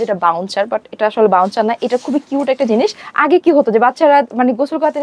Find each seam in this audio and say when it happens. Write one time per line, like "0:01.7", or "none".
0:03.0